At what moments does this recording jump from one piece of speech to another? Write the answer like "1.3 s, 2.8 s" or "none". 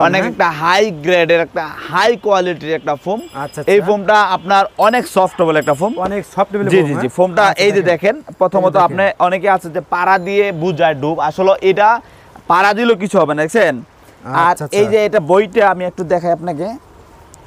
none